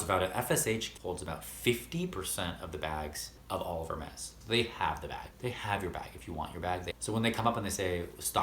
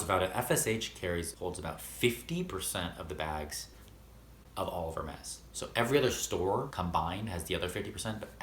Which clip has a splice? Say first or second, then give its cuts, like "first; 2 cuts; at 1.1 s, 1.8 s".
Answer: first; 4 cuts; at 0.9 s, 3.3 s, 4.3 s, 6.9 s